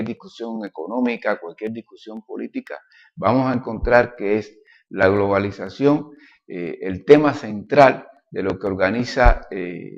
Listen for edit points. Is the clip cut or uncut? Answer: cut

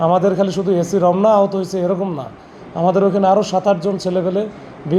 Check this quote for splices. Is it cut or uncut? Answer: uncut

